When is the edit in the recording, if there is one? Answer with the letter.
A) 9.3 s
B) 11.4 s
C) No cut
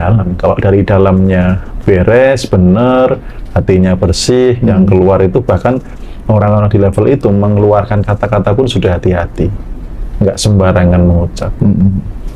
C